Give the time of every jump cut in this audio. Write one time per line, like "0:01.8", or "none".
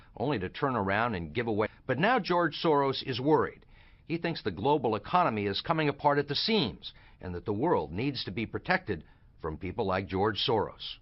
none